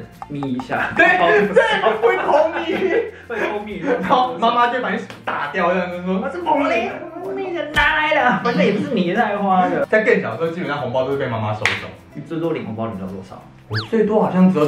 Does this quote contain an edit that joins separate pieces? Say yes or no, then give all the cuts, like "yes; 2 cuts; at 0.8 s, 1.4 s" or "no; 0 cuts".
no; 0 cuts